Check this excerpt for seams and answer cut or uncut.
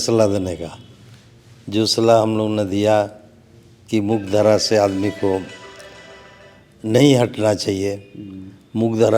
uncut